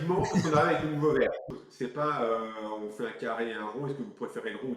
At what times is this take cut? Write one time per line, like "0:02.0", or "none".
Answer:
0:01.5